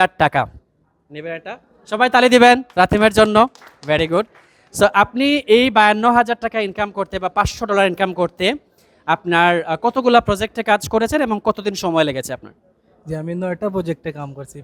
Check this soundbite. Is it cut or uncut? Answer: uncut